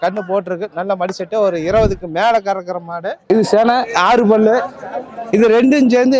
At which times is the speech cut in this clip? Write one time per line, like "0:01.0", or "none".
0:03.2